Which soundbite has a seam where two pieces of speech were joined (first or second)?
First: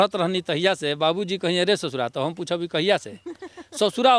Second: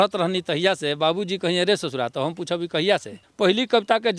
second